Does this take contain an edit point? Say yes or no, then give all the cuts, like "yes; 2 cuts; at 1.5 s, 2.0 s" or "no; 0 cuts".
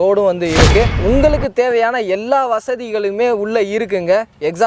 yes; 1 cut; at 1.0 s